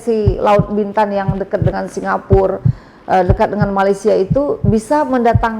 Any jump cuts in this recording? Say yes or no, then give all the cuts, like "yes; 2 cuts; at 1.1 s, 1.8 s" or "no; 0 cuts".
no; 0 cuts